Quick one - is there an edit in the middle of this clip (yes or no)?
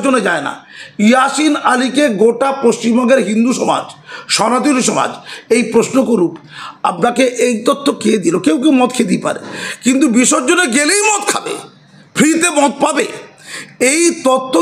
no